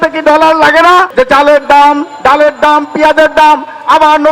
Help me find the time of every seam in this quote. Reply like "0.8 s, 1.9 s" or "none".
1.1 s